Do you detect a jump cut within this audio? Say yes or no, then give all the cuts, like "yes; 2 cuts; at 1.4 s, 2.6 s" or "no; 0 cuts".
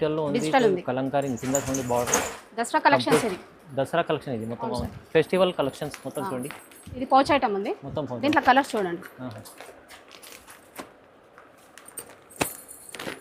no; 0 cuts